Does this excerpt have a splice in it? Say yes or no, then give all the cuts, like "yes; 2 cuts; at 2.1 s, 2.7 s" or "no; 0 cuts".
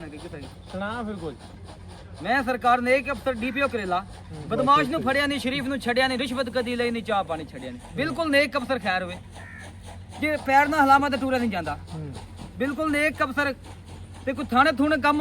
no; 0 cuts